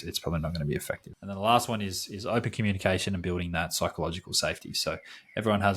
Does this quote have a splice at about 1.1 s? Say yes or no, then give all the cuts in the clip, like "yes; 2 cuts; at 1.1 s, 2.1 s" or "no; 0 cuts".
yes; 1 cut; at 1.1 s